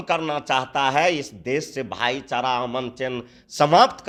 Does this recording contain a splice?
no; 0 cuts

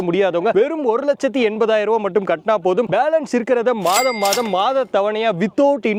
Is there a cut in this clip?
no; 0 cuts

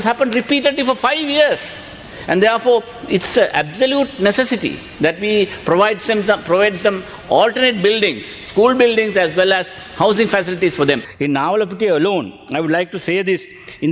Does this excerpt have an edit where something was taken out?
yes; 1 cut; at 11.1 s

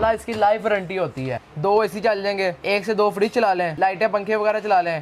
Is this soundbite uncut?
no; 3 cuts; at 1.4 s, 2.6 s, 3.7 s

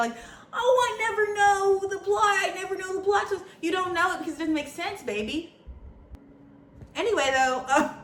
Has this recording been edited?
no; 0 cuts

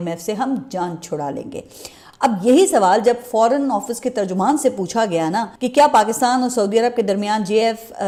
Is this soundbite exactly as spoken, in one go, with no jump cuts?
yes; 0 cuts

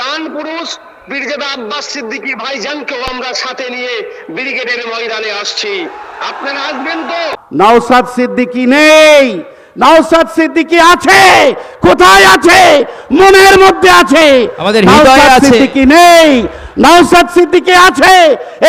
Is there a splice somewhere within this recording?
yes; 1 cut; at 7.4 s

